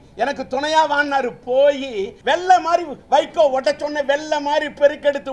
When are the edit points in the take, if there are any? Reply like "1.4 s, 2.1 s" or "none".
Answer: 2.1 s